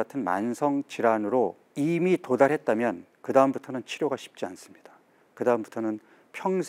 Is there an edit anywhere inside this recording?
yes; 1 cut; at 1.6 s

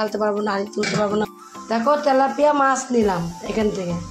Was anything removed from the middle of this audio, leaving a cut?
yes; 1 cut; at 1.3 s

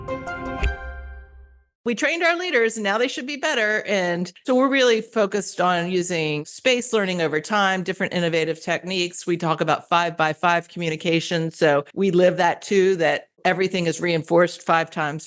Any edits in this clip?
yes; 1 cut; at 1.8 s

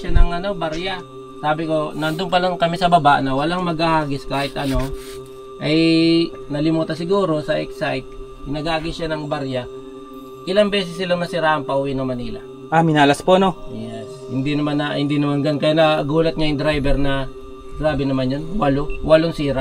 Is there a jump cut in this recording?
no; 0 cuts

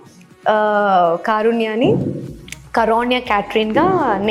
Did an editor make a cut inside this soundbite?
no; 0 cuts

